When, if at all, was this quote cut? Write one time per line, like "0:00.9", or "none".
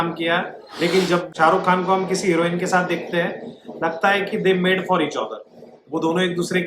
0:01.3

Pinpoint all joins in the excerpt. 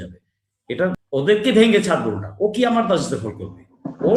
0:01.0

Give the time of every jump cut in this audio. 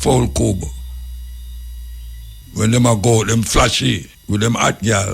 0:02.4
0:04.1

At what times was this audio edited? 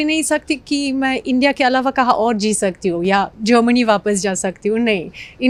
none

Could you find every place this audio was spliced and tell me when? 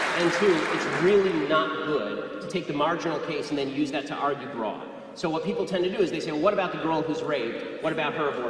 0:02.2

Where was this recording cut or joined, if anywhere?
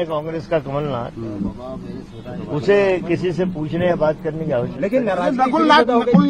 none

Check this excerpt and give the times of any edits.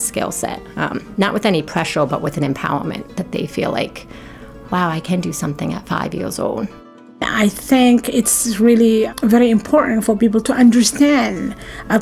0:07.2
0:09.1

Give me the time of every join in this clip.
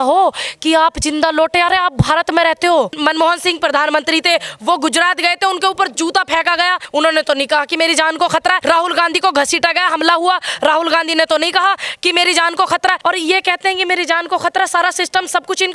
0:02.9
0:06.8
0:08.6
0:13.0

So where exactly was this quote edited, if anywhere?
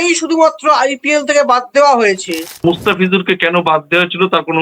0:02.6

